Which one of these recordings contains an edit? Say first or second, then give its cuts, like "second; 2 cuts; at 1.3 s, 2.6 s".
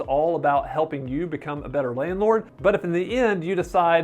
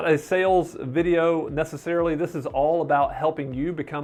first; 1 cut; at 2.5 s